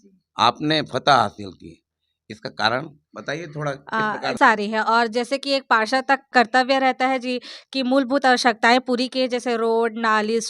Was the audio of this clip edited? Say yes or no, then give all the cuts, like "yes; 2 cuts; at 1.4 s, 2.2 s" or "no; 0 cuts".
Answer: yes; 2 cuts; at 4.3 s, 6.3 s